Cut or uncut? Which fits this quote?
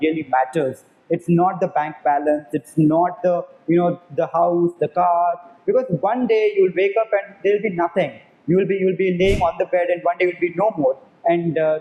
uncut